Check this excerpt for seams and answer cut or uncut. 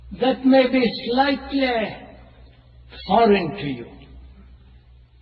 cut